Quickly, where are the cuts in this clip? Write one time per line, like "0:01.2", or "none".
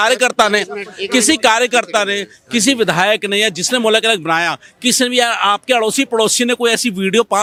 none